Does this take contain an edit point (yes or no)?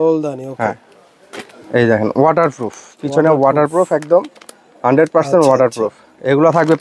no